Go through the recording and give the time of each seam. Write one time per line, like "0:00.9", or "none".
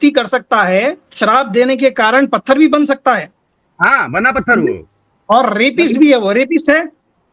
none